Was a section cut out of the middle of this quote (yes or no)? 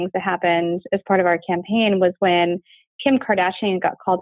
no